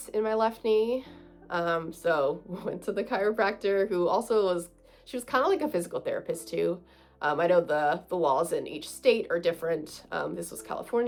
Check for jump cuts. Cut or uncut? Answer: uncut